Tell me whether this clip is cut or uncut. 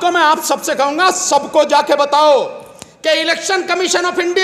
uncut